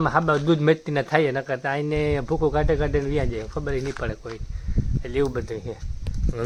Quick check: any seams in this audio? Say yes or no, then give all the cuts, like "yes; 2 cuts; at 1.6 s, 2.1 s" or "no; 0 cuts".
no; 0 cuts